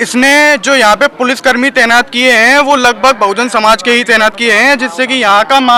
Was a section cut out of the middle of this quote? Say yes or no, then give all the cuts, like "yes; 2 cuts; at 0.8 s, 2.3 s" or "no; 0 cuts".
no; 0 cuts